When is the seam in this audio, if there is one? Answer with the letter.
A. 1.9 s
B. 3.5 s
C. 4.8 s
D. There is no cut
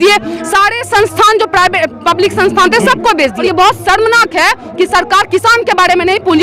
B